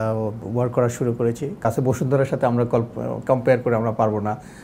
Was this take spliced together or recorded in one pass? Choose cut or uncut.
cut